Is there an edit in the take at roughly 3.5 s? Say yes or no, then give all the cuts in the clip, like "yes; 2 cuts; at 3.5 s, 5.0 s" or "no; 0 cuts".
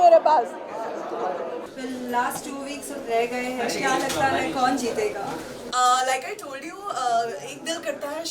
no; 1 cut; at 1.6 s